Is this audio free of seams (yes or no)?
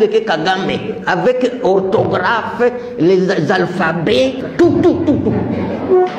no